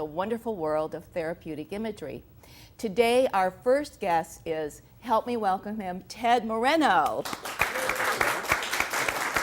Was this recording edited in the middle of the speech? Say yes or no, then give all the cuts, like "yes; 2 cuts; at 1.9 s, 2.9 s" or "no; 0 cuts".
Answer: yes; 1 cut; at 7.4 s